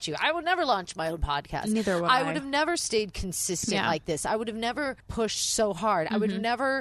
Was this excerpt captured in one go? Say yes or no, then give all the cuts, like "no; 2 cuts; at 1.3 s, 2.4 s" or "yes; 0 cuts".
no; 1 cut; at 5.0 s